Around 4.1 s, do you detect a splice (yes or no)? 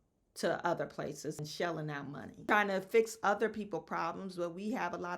no